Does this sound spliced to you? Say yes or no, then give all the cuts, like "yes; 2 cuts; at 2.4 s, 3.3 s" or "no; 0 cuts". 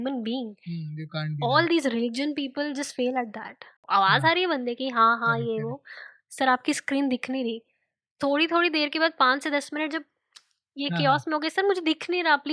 yes; 1 cut; at 3.8 s